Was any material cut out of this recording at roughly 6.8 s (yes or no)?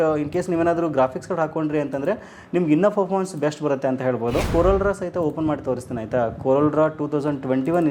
no